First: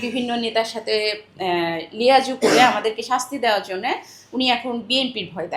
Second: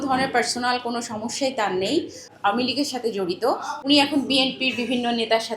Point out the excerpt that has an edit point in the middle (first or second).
second